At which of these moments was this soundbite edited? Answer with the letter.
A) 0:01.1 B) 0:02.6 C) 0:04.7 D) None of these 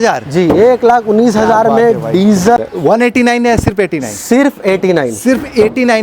B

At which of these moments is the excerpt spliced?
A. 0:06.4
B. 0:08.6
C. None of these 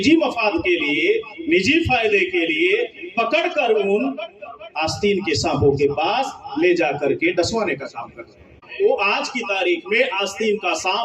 B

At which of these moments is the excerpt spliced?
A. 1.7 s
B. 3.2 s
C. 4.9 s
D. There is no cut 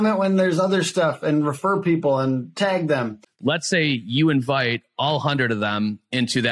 B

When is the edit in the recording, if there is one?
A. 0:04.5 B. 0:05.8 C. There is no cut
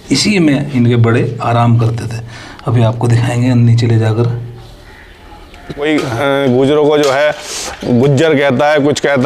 B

